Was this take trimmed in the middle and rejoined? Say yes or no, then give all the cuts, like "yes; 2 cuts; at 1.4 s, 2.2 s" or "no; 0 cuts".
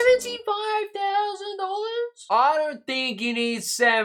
no; 0 cuts